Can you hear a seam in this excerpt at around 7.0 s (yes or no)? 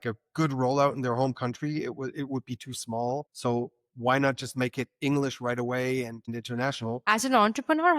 yes